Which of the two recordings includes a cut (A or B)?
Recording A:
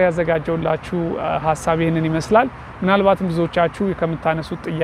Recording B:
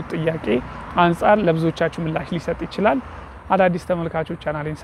B